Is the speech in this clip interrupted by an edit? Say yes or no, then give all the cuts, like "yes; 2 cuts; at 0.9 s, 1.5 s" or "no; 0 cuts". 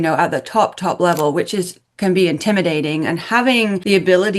no; 0 cuts